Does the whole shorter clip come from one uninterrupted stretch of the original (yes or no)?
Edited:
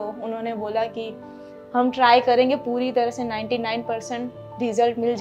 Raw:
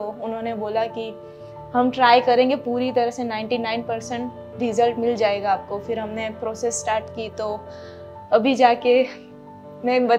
yes